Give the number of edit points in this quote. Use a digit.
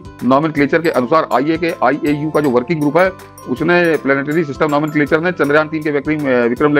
0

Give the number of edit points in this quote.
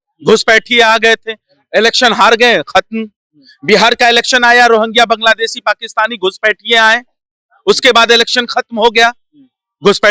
0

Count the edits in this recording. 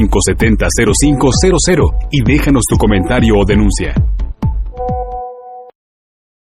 1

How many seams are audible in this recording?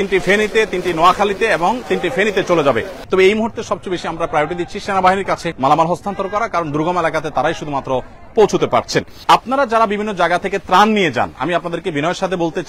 3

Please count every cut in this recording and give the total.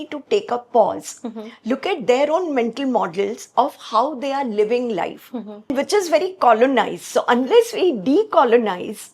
1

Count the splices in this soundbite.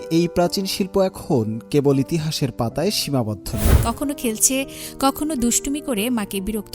1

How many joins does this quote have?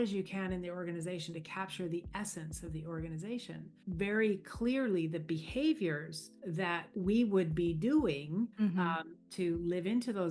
3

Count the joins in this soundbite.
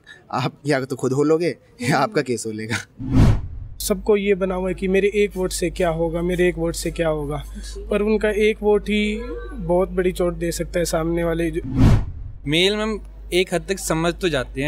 2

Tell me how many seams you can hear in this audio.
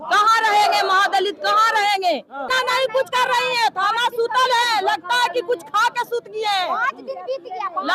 1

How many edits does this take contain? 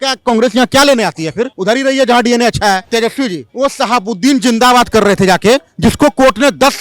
1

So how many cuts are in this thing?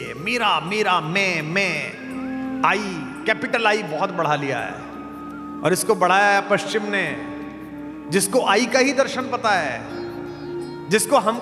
0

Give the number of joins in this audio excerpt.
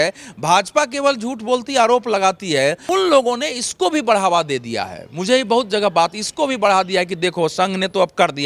1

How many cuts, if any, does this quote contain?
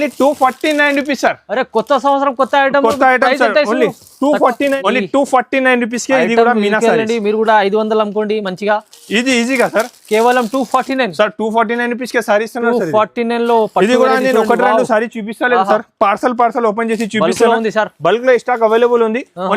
1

